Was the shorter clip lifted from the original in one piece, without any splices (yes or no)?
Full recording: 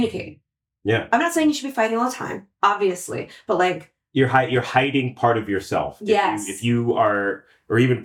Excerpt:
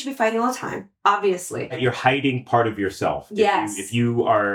no